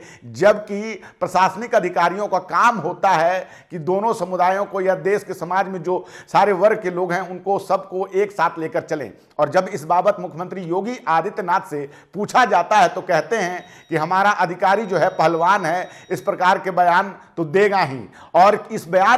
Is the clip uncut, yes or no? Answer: yes